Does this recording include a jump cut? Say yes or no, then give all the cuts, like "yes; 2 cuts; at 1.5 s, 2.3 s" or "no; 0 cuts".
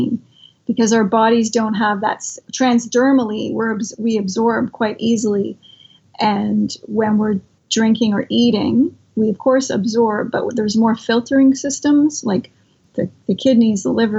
yes; 4 cuts; at 2.5 s, 6.0 s, 7.6 s, 12.8 s